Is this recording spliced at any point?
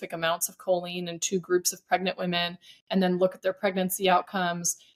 no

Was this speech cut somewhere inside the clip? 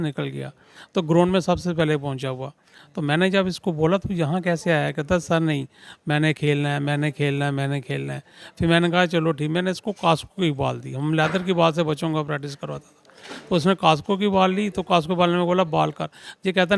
no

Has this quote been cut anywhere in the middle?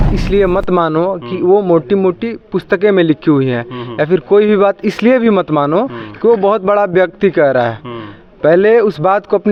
no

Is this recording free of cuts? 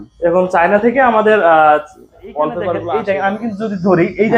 no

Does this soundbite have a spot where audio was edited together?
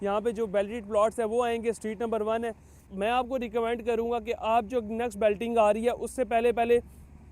yes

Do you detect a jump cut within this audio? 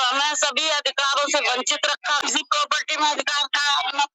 yes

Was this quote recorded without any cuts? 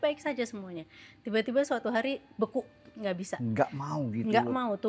yes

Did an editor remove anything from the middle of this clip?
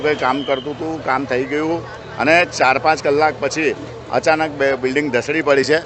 no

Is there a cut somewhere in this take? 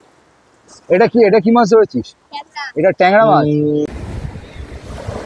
yes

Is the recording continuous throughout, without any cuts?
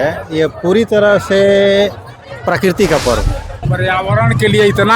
no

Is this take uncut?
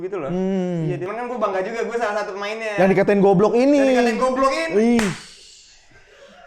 no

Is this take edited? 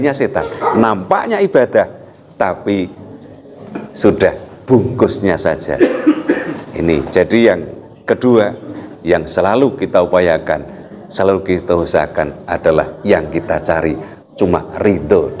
no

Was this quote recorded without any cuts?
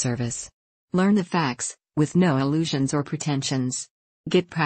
yes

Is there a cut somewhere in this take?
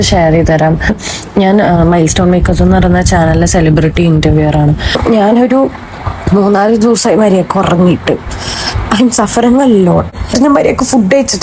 yes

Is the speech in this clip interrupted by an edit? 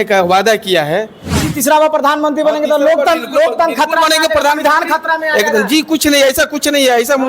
yes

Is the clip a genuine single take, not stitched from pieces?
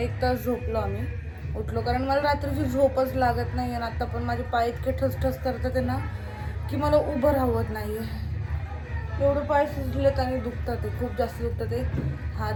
yes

